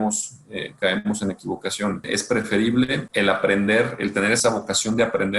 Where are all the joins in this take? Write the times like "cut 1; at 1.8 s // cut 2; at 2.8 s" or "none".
cut 1; at 2.1 s // cut 2; at 3.1 s // cut 3; at 4.4 s